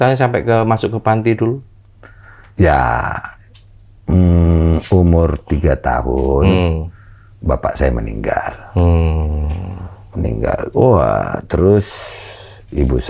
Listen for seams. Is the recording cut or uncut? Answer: uncut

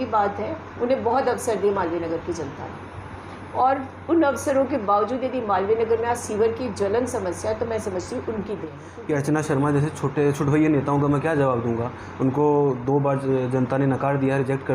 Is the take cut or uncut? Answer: cut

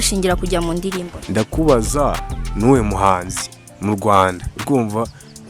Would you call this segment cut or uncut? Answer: uncut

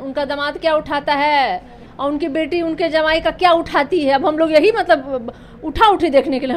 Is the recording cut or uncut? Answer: uncut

